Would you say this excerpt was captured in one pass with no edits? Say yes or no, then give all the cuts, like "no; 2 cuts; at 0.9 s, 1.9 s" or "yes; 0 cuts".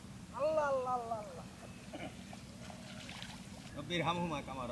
no; 1 cut; at 3.7 s